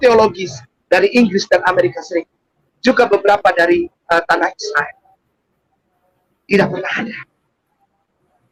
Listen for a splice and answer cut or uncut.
uncut